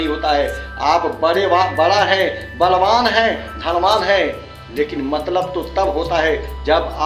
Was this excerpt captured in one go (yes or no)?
yes